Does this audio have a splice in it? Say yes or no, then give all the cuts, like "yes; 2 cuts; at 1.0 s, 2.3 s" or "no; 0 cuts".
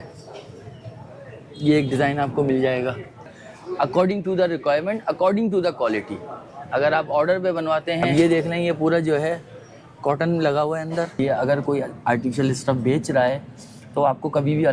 yes; 3 cuts; at 3.3 s, 8.1 s, 11.2 s